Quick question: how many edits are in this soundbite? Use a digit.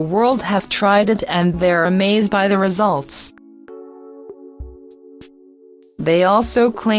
1